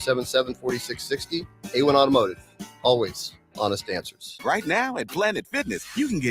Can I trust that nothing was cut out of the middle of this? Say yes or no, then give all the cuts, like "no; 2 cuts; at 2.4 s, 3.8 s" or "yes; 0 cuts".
no; 1 cut; at 4.3 s